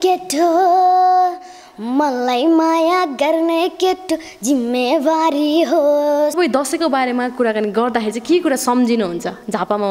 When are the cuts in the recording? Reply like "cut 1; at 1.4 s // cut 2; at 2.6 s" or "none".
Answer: cut 1; at 6.4 s